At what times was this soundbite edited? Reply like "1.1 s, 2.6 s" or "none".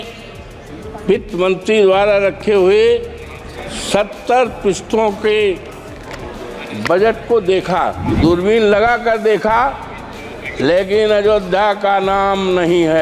8.0 s